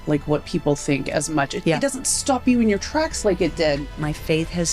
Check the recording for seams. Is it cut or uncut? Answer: cut